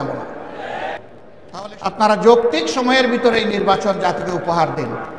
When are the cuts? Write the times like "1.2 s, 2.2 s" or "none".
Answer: 1.1 s